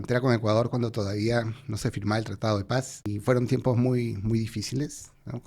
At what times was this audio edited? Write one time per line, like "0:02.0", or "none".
0:03.0